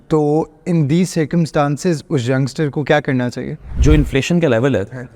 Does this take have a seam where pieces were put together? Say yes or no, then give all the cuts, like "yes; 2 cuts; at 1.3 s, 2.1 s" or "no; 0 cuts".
yes; 1 cut; at 3.6 s